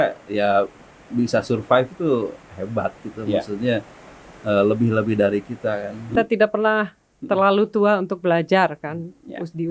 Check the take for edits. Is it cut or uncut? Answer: cut